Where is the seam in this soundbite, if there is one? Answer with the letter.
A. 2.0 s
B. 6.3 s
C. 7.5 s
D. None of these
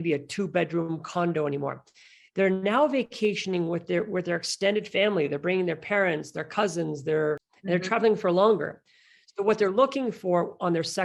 C